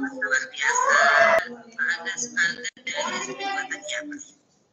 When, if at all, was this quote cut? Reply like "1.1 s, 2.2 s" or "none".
1.4 s